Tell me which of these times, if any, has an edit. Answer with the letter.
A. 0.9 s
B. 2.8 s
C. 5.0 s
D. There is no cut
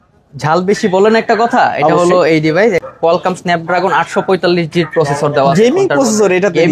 B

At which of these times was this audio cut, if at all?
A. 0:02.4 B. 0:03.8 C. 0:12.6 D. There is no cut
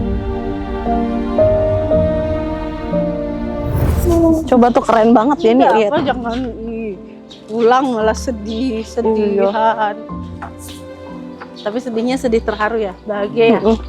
B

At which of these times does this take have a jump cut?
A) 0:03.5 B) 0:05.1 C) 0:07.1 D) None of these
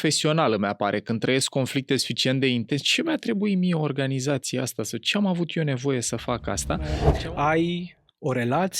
C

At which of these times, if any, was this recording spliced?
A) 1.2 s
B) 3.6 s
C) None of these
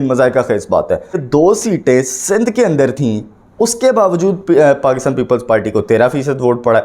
A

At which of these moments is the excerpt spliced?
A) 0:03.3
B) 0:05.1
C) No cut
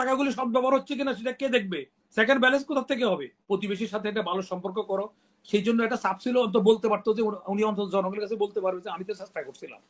A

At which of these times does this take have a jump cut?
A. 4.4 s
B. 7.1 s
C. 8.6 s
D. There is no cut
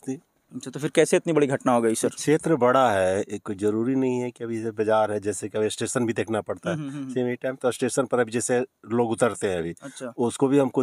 D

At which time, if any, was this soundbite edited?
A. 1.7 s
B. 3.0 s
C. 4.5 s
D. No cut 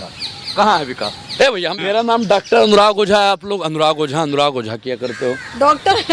A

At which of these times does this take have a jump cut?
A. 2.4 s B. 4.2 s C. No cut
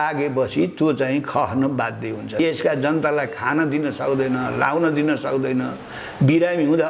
A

